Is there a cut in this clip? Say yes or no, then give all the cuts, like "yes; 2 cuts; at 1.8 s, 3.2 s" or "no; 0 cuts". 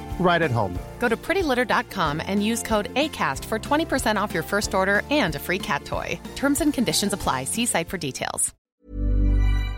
yes; 1 cut; at 8.5 s